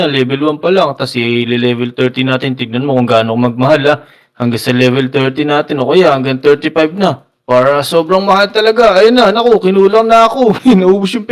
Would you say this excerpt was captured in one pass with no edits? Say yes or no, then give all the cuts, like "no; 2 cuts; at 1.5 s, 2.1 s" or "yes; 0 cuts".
yes; 0 cuts